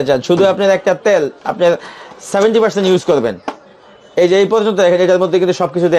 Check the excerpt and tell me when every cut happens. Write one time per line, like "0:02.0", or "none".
none

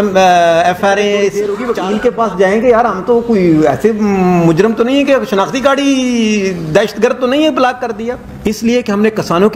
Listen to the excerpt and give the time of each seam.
0:01.4
0:08.2

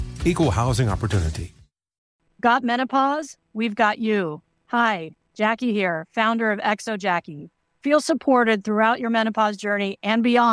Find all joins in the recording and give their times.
0:02.1

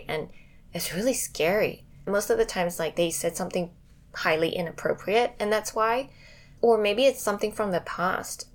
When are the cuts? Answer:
0:02.1
0:06.5

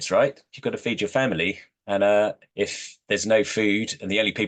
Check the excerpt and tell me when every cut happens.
none

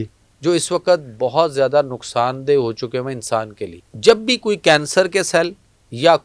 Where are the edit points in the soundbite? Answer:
0:03.9

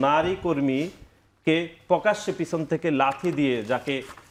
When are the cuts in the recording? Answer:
none

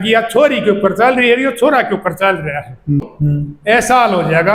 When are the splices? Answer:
0:03.1

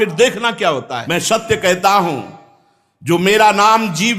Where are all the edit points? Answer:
0:01.0

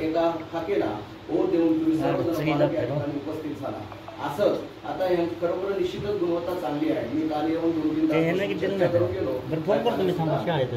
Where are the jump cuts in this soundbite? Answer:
none

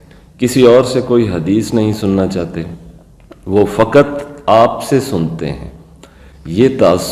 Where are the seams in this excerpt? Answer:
none

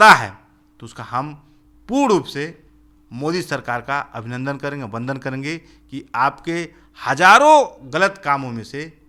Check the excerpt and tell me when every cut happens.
none

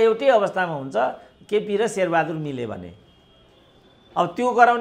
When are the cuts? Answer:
none

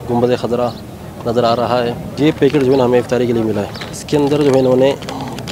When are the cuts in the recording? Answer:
0:02.2
0:03.9

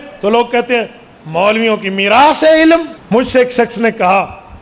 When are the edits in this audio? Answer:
0:03.0

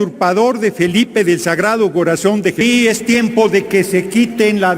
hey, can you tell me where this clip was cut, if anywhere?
0:02.6

